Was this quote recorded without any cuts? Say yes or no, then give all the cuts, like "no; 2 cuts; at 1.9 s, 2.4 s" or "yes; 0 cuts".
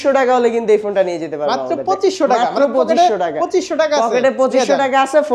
yes; 0 cuts